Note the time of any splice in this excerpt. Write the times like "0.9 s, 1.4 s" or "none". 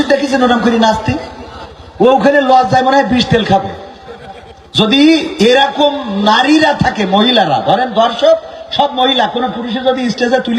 none